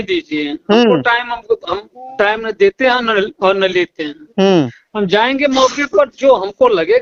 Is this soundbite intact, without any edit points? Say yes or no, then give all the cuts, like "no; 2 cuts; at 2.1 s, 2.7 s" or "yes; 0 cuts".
yes; 0 cuts